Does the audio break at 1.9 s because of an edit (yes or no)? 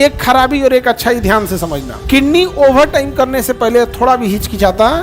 yes